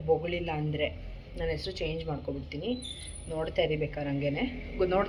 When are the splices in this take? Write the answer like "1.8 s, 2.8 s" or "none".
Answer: none